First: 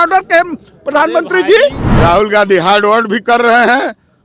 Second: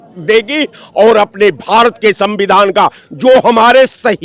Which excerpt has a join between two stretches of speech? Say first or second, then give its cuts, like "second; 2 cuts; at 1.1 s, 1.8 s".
first; 1 cut; at 1.8 s